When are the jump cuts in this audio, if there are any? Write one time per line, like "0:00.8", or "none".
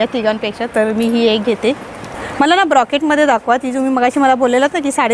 none

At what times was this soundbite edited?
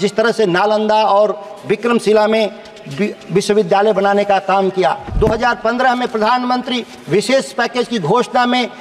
0:05.1

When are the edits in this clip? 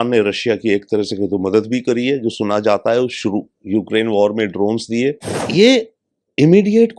0:05.3

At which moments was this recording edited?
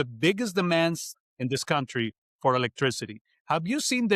0:01.1

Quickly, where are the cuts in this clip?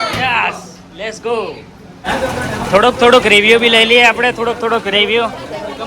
0:02.0

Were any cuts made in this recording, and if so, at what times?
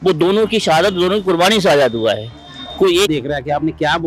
0:03.1

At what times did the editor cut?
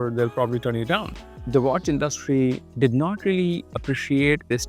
0:01.2
0:02.7

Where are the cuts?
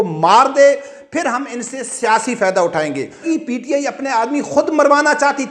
0:03.2

